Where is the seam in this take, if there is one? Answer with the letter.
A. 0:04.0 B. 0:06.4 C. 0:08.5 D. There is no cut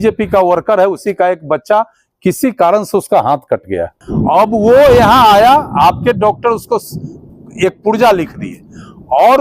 A